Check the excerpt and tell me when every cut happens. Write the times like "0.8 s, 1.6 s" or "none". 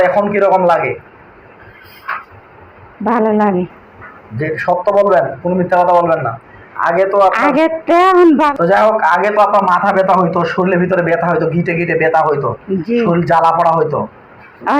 8.5 s